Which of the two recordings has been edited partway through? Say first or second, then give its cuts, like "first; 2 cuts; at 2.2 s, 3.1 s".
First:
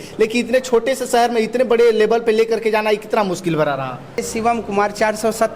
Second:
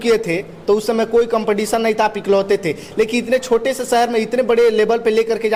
first; 1 cut; at 4.3 s